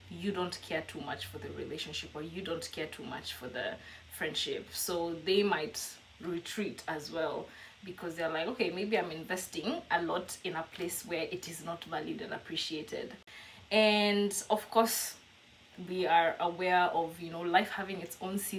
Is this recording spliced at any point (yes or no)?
no